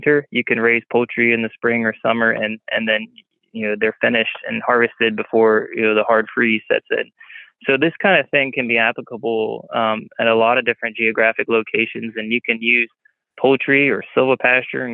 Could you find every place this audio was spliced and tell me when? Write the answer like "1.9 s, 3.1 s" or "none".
none